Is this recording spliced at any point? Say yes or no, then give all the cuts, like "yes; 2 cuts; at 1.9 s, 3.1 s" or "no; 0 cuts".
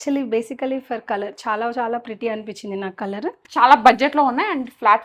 yes; 1 cut; at 3.5 s